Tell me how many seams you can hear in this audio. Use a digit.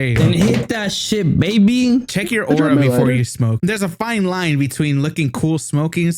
1